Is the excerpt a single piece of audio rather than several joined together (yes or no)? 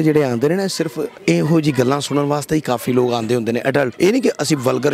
no